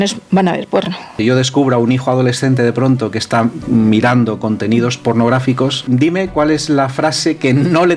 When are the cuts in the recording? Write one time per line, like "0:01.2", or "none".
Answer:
0:01.1
0:05.8